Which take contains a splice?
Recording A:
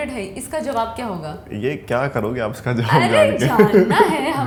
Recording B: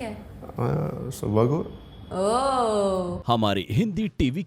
B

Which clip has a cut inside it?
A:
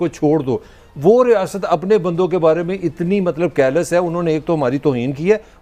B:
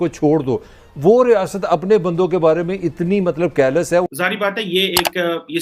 B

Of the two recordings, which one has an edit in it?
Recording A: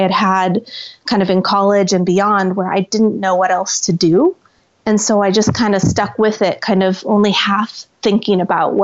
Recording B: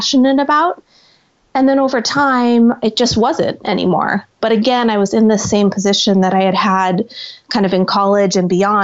B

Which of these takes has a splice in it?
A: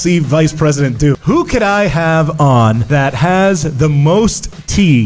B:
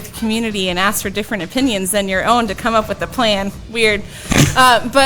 A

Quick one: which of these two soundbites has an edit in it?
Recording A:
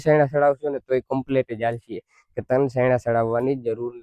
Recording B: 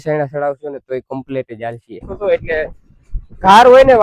B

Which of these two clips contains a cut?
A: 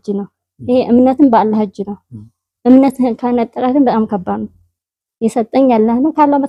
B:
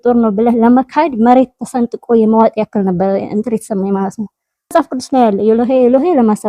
B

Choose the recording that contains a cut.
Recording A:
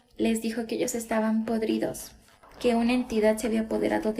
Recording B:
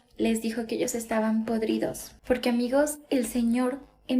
B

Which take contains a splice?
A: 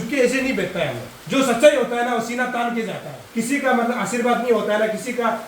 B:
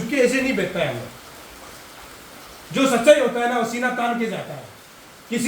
A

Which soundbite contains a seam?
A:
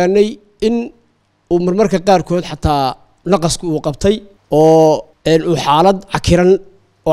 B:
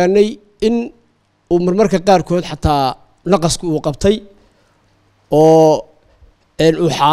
A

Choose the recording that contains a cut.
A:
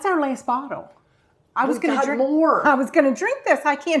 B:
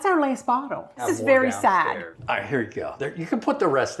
B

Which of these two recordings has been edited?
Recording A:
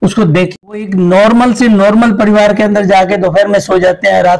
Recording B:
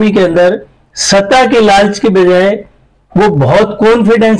A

